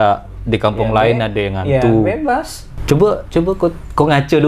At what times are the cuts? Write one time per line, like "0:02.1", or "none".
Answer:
0:02.7